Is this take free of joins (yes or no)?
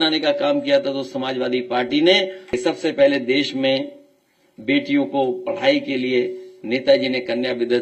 no